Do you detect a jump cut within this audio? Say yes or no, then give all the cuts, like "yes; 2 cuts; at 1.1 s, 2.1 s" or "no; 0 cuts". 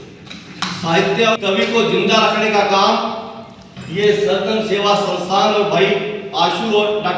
yes; 1 cut; at 1.4 s